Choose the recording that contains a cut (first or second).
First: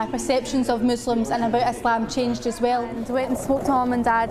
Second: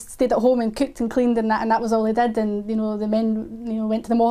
first